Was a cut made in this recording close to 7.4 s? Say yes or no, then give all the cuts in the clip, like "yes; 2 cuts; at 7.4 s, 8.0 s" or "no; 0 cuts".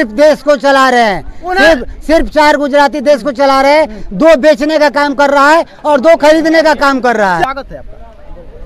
yes; 1 cut; at 7.4 s